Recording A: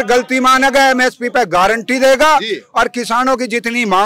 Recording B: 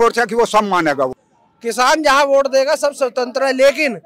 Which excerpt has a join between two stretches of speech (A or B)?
B